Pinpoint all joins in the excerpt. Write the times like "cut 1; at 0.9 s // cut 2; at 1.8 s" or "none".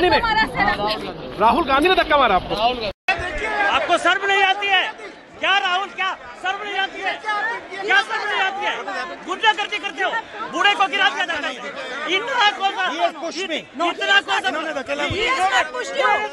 cut 1; at 3.0 s